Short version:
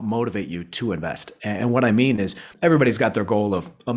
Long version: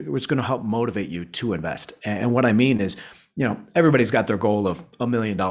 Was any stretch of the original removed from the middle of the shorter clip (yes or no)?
yes